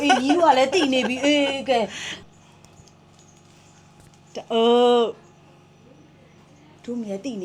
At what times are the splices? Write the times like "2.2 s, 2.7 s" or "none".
2.1 s